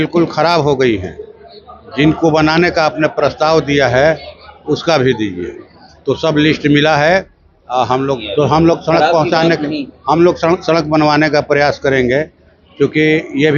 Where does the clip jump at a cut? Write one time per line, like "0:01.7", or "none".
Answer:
0:08.2